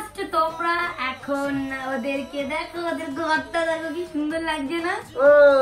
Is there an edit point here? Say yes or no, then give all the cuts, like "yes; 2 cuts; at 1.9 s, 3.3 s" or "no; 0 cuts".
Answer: no; 0 cuts